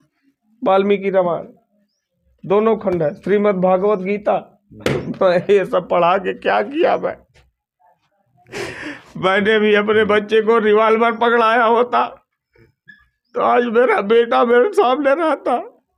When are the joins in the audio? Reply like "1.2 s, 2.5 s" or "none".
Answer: none

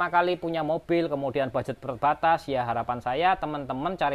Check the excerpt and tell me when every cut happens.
none

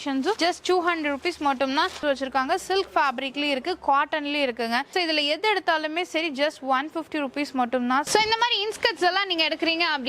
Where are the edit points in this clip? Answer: 2.0 s, 8.1 s

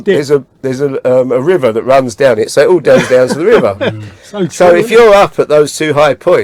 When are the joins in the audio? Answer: none

